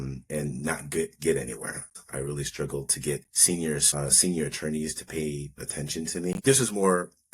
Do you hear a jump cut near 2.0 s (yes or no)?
yes